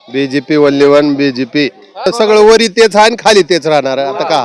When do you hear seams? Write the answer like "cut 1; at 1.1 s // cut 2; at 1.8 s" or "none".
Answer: cut 1; at 2.1 s

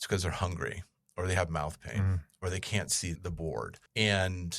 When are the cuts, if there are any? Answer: cut 1; at 3.5 s

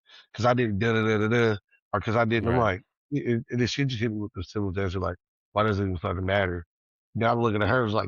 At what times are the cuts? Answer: none

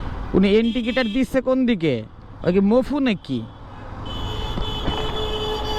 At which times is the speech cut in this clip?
none

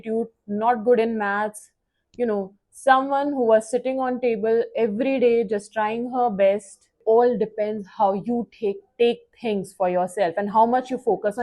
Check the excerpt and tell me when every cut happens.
cut 1; at 7.0 s

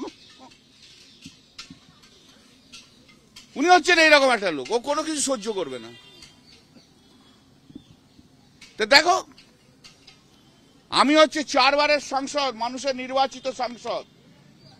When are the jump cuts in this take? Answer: none

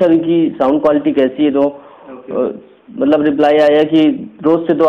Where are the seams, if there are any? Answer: none

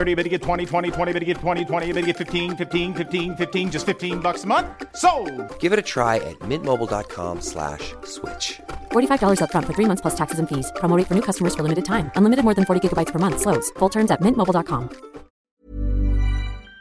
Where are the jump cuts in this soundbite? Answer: cut 1; at 15.5 s

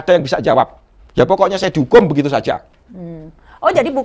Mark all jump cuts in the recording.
none

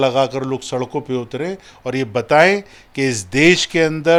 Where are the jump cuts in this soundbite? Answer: none

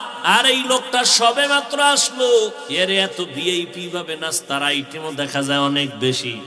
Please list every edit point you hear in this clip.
cut 1; at 2.6 s

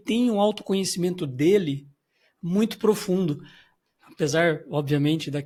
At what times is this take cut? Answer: none

